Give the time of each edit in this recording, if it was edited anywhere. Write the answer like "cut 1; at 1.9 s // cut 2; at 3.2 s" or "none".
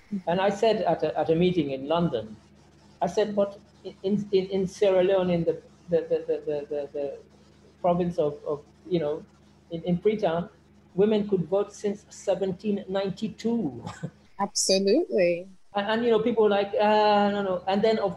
none